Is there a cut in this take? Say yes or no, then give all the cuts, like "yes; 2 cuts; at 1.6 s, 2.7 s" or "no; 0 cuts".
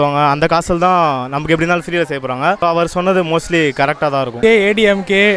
no; 0 cuts